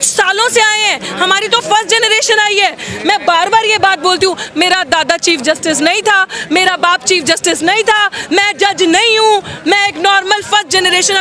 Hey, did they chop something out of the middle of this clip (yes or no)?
no